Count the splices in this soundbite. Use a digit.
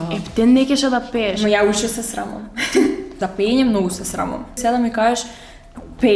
2